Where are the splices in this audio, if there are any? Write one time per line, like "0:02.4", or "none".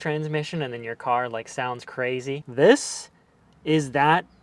0:02.4